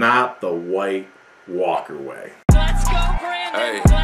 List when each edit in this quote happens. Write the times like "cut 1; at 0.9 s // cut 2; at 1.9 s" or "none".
cut 1; at 2.3 s